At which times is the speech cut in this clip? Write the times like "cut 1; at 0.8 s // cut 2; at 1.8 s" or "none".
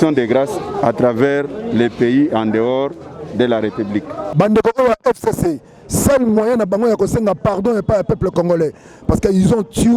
cut 1; at 4.2 s